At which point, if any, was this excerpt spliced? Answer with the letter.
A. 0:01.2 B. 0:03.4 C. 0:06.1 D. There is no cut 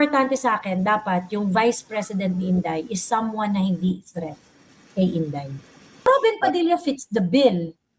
C